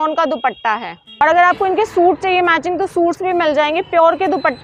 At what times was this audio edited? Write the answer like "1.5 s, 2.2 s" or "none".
1.2 s